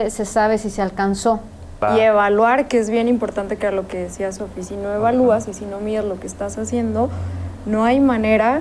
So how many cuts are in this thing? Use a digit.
1